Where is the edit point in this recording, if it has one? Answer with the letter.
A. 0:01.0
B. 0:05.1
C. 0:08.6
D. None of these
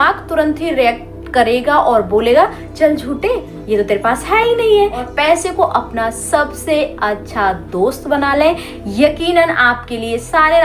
B